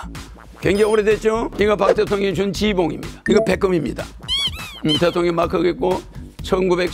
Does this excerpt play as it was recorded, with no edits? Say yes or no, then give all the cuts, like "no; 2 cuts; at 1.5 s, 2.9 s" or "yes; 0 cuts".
no; 2 cuts; at 1.5 s, 3.1 s